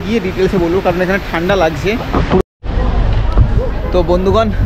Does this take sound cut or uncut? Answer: cut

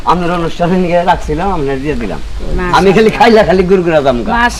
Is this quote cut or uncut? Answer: uncut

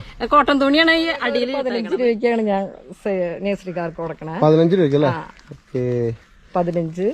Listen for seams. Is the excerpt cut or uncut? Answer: cut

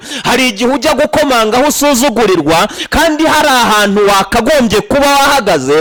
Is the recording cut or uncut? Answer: uncut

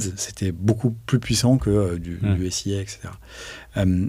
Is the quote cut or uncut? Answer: uncut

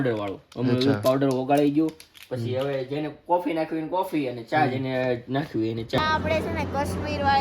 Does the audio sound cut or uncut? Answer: cut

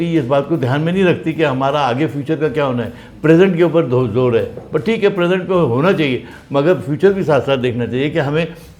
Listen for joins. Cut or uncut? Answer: uncut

